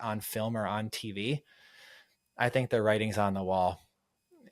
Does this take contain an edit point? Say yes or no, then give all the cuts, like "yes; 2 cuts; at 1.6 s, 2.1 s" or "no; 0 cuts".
no; 0 cuts